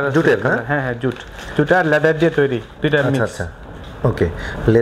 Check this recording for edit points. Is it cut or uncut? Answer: uncut